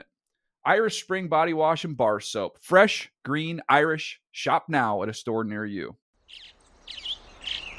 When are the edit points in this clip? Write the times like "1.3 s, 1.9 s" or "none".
6.0 s